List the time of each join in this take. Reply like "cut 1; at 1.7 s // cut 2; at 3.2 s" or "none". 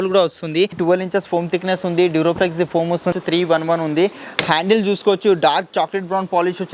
cut 1; at 0.8 s // cut 2; at 3.1 s